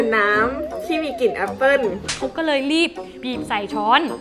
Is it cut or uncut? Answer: cut